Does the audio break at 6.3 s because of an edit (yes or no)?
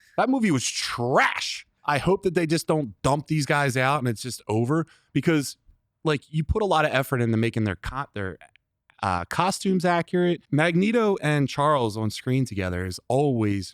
no